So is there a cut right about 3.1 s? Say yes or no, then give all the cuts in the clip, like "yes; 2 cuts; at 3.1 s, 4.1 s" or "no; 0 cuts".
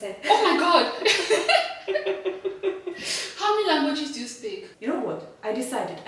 no; 1 cut; at 4.7 s